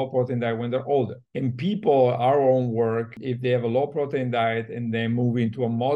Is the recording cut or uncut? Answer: cut